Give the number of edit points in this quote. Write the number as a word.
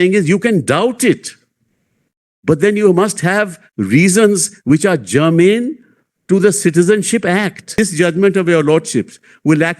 one